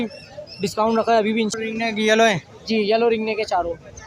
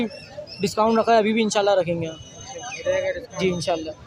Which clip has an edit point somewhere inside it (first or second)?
first